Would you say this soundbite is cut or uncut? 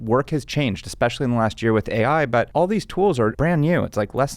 cut